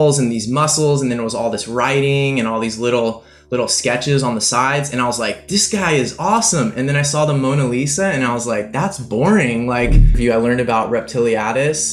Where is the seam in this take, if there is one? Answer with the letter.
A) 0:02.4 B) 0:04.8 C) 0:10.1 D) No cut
C